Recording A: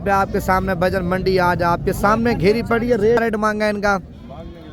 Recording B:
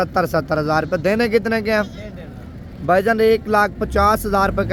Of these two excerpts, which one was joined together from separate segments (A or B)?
A